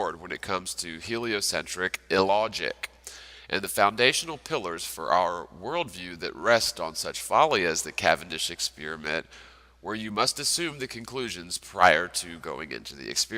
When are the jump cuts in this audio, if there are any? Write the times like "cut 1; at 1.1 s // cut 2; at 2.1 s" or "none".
cut 1; at 5.2 s